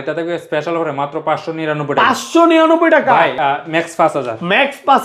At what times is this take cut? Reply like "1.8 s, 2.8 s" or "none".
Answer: 3.4 s